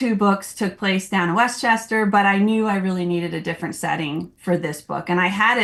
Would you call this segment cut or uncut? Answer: uncut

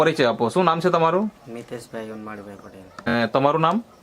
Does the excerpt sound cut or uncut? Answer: cut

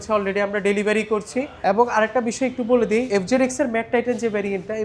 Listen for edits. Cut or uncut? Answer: cut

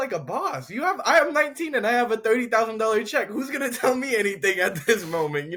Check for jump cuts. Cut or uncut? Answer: uncut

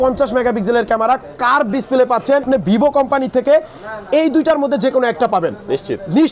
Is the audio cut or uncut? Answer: cut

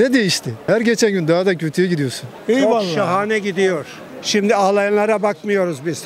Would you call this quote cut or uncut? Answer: cut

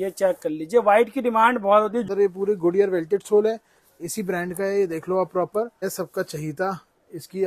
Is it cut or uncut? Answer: cut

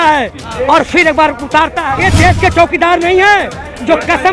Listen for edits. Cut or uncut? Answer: cut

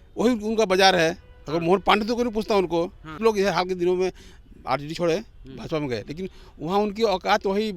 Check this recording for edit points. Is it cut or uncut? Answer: cut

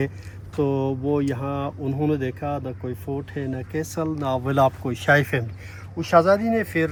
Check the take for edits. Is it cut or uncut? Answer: uncut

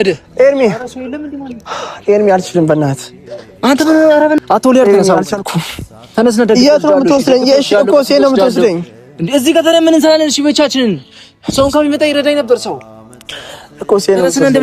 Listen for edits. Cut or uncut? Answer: cut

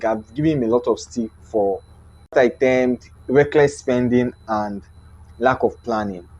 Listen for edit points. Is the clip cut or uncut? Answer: cut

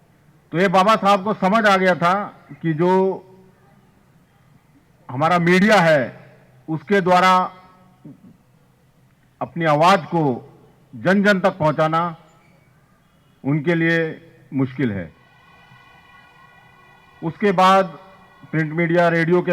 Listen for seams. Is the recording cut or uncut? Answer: cut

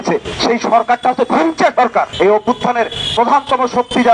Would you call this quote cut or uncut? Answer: cut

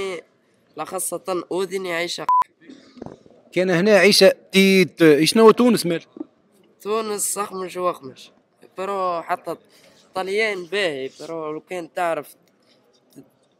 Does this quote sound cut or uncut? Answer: uncut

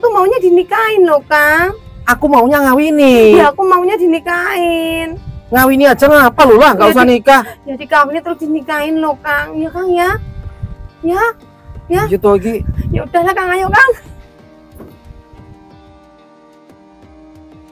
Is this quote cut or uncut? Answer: cut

